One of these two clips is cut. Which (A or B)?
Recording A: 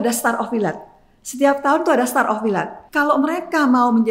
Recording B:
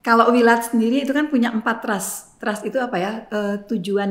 A